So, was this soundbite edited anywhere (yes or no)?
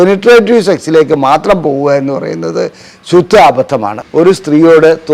yes